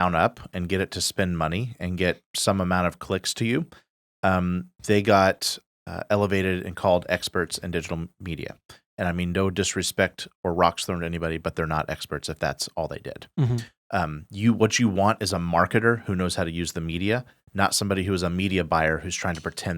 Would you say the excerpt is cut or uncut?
uncut